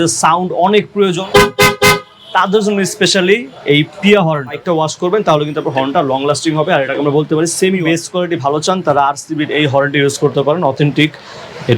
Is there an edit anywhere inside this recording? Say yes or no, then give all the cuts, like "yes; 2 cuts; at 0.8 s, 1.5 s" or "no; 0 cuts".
yes; 3 cuts; at 1.2 s, 4.6 s, 7.8 s